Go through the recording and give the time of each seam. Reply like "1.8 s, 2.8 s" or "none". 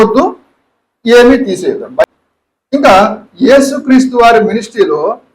2.0 s